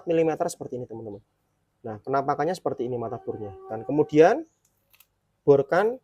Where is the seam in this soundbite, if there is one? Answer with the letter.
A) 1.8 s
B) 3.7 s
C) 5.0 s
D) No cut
B